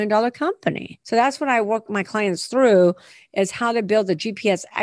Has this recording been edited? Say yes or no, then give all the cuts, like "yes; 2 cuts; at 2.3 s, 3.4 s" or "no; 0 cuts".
yes; 2 cuts; at 0.9 s, 1.9 s